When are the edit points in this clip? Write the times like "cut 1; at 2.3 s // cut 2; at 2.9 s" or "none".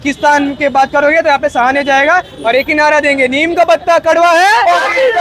none